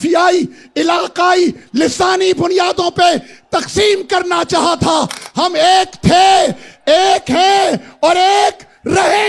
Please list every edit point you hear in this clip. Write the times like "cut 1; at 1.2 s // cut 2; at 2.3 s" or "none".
none